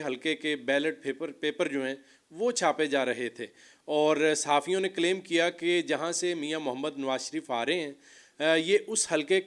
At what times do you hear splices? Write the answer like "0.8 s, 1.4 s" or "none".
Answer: none